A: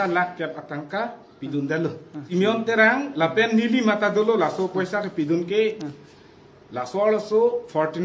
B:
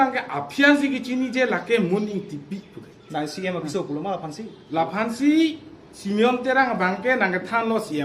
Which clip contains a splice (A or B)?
A